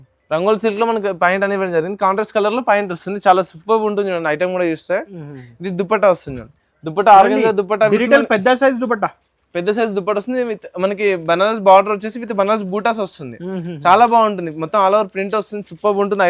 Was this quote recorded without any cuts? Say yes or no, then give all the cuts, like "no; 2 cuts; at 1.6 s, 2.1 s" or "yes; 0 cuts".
yes; 0 cuts